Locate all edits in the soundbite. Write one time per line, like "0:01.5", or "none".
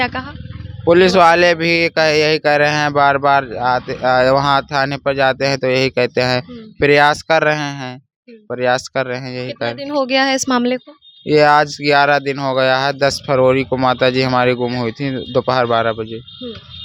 none